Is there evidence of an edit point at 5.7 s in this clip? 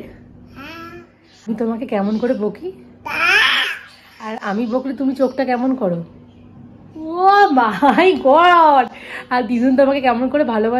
no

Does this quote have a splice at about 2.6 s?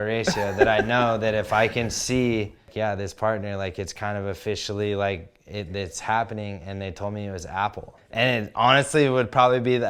yes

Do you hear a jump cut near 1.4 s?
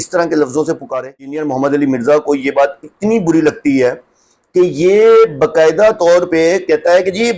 yes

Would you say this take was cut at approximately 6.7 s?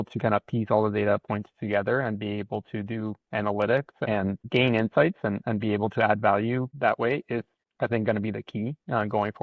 yes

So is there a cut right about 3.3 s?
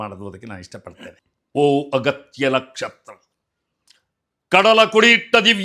no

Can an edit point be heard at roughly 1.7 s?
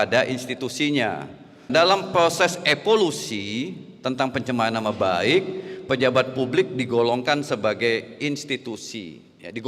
yes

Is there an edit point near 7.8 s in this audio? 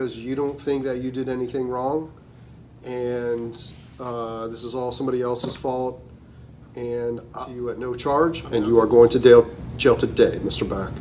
yes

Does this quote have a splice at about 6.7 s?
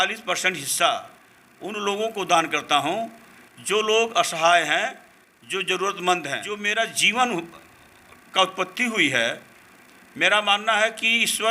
yes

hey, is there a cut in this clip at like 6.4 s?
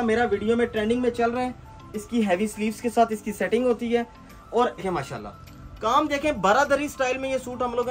no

